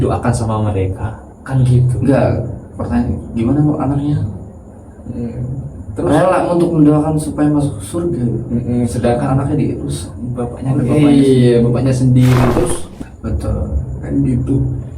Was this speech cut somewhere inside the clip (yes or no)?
yes